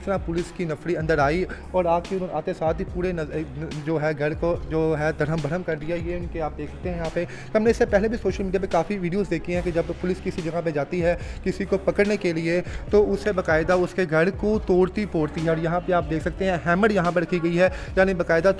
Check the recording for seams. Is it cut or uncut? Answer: uncut